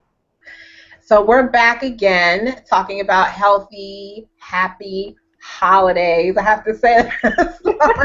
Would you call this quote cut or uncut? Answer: uncut